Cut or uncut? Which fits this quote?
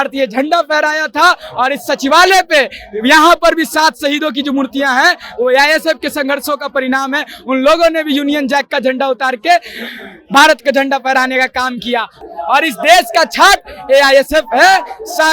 cut